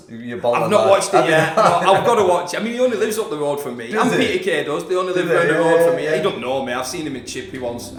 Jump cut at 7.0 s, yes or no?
no